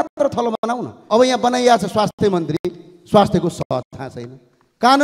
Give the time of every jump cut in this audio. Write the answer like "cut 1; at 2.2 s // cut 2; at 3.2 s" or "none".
cut 1; at 0.9 s

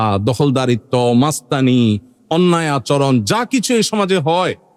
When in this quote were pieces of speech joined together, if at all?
none

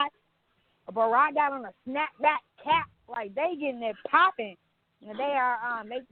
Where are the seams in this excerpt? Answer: none

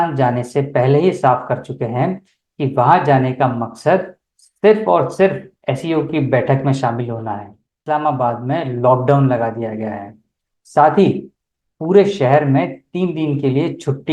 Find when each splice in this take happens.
cut 1; at 7.7 s

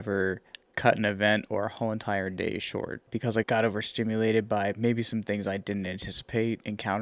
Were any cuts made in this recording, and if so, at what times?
cut 1; at 3.4 s

